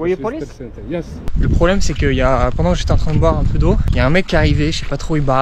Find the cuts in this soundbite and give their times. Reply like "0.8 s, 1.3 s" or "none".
1.3 s